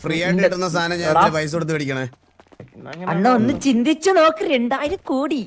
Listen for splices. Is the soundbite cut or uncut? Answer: cut